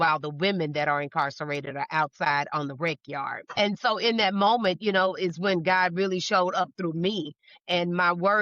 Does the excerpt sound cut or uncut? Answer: cut